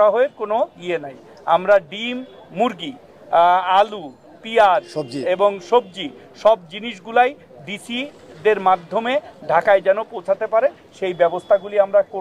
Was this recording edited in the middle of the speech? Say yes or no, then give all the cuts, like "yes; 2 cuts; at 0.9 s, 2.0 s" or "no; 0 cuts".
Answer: no; 0 cuts